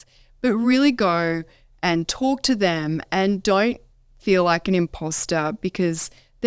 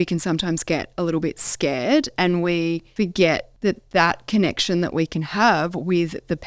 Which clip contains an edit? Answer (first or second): second